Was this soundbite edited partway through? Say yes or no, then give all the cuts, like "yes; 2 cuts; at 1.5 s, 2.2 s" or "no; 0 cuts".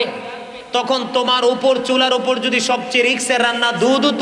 no; 0 cuts